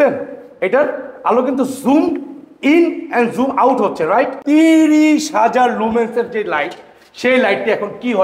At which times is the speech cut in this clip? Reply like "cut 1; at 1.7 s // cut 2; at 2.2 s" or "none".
cut 1; at 4.4 s